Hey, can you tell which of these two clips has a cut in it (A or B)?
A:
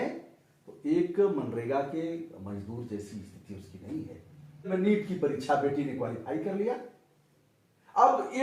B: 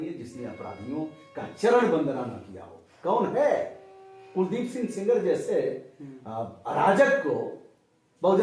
A